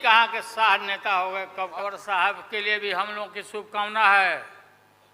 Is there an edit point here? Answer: yes; 1 cut; at 1.7 s

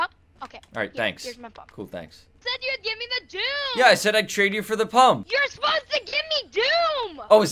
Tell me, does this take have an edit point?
no; 0 cuts

